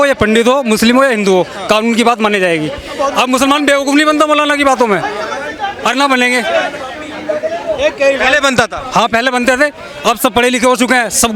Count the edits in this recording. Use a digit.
0